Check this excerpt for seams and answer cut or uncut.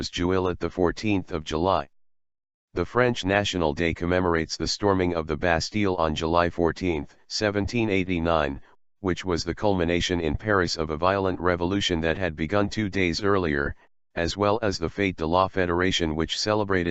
cut